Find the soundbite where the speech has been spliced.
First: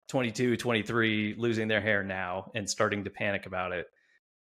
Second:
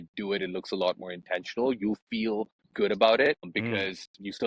second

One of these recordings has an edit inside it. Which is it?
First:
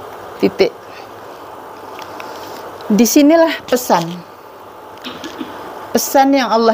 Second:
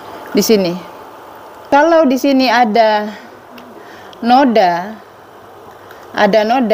second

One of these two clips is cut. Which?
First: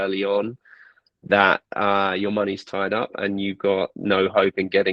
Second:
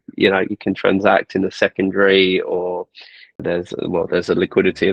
second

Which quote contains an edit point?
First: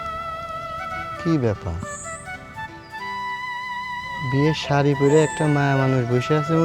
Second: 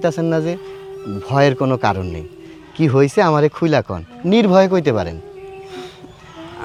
first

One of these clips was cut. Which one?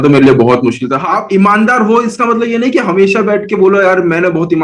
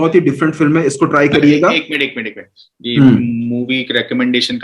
first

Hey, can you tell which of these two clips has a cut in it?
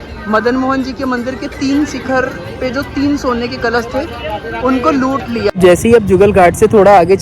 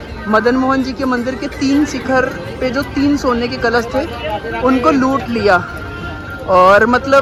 first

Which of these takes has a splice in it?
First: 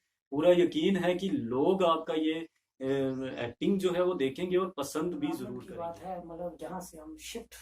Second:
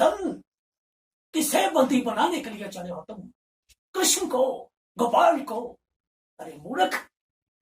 first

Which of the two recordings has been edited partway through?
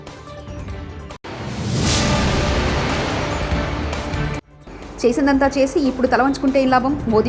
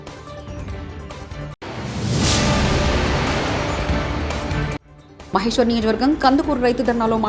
first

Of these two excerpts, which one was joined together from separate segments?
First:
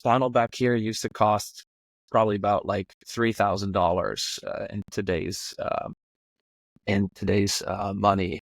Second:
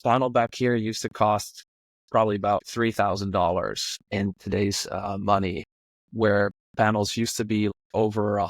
second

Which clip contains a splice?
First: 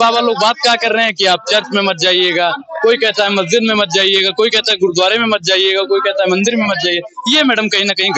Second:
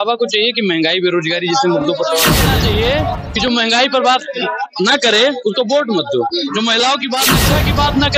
second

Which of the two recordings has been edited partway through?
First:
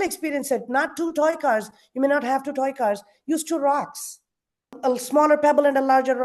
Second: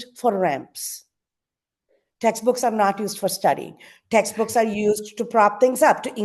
first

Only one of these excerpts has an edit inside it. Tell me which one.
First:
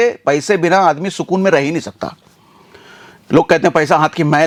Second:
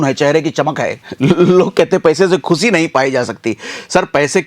second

